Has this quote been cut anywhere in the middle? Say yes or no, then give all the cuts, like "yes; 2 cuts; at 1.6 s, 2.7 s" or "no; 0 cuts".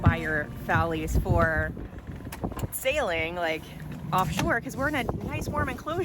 no; 0 cuts